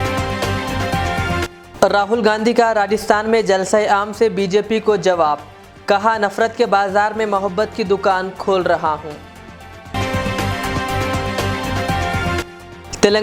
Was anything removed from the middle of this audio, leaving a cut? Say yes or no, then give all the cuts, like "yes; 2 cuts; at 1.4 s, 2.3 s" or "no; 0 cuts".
no; 0 cuts